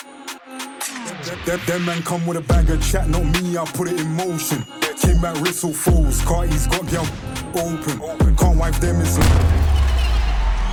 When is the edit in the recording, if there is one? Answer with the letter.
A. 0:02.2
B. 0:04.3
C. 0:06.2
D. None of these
D